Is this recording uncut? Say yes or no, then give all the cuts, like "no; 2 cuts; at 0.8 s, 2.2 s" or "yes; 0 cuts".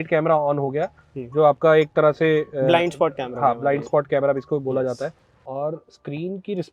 no; 1 cut; at 5.3 s